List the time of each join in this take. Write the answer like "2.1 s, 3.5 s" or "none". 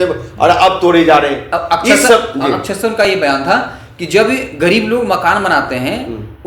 none